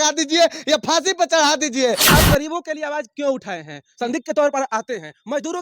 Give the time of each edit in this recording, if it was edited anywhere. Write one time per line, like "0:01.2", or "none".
0:02.0